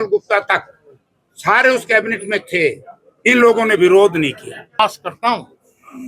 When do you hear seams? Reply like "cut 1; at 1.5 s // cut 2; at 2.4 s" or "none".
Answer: cut 1; at 4.8 s